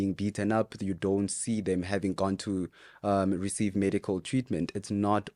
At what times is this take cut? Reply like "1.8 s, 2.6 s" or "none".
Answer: none